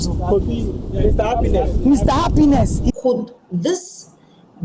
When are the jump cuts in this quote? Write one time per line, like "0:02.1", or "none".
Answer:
0:02.9